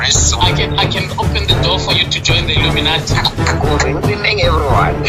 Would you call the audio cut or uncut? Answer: uncut